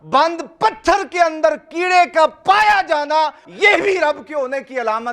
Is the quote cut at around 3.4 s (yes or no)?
yes